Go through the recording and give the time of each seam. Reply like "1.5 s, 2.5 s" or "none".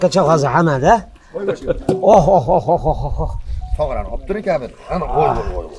none